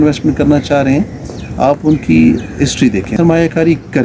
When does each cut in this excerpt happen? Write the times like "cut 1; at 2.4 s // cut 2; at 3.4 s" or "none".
cut 1; at 3.1 s